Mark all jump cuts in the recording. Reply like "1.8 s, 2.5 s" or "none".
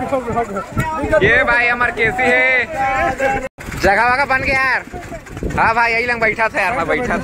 3.4 s